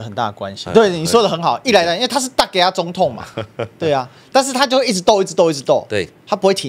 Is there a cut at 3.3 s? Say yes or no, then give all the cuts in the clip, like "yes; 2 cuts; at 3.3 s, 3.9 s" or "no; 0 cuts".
no; 0 cuts